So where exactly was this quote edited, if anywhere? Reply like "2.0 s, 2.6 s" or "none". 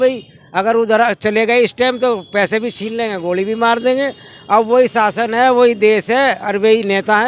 none